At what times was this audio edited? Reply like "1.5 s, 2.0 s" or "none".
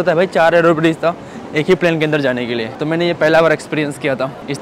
none